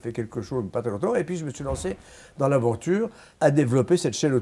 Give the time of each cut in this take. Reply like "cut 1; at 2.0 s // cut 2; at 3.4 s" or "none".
cut 1; at 3.2 s